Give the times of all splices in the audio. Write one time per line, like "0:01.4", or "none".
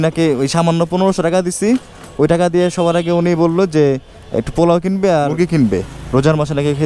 0:05.4

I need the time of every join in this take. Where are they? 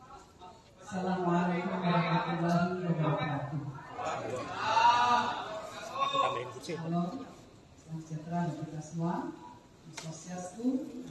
0:10.1

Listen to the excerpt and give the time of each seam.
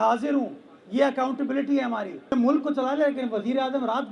0:02.3

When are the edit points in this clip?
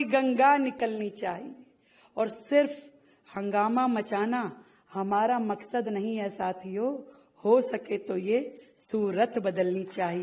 none

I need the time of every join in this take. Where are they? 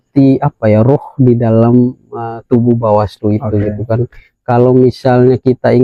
none

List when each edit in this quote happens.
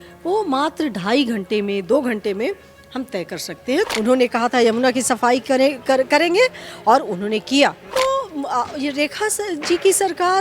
0:03.9
0:07.8

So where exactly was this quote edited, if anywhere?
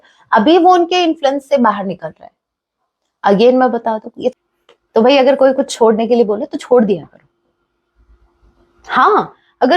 0:04.3

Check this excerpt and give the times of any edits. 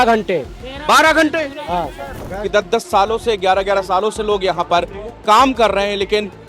0:02.1

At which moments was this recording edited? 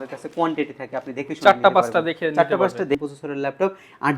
0:03.0

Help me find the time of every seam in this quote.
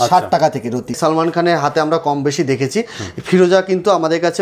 0:01.0

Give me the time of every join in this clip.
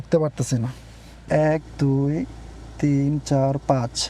0:01.3

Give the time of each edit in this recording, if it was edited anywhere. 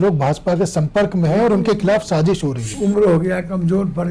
0:02.7

